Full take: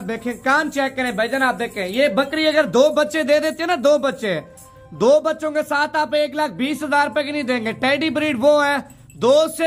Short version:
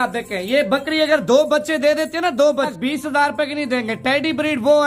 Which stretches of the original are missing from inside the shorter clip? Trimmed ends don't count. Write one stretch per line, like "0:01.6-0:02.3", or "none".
0:04.2-0:06.5